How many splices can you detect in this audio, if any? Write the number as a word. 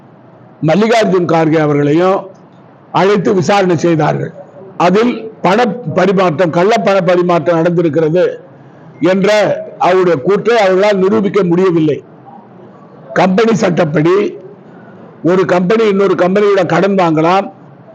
one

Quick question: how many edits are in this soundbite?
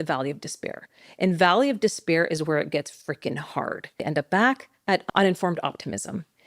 two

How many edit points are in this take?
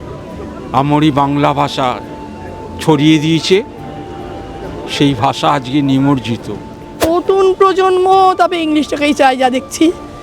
one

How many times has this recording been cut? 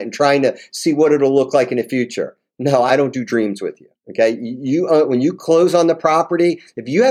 zero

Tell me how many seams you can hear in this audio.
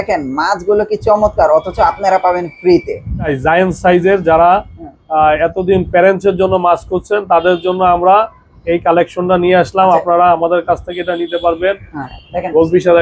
two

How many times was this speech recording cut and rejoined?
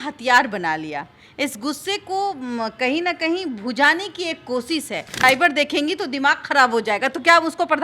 one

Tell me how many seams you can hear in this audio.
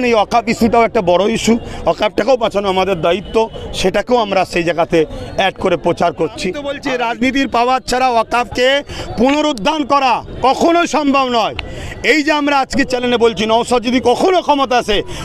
one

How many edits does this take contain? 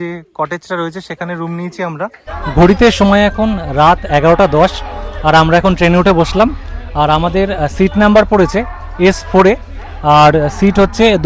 one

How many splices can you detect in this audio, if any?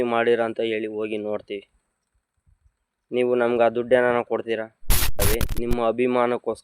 one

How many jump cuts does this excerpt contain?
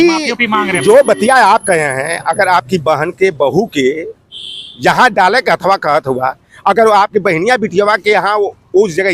zero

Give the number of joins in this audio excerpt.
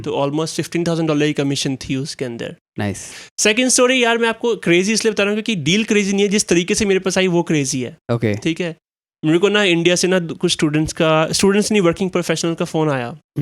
one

